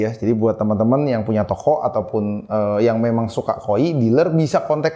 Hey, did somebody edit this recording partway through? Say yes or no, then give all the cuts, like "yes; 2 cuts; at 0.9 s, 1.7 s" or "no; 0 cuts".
no; 0 cuts